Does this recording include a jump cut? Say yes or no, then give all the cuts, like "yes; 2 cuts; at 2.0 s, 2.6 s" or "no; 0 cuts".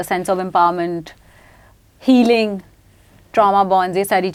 no; 0 cuts